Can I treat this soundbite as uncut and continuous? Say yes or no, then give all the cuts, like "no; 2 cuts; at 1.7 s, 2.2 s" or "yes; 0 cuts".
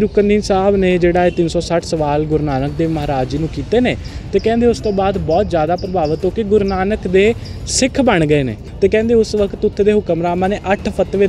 no; 1 cut; at 8.6 s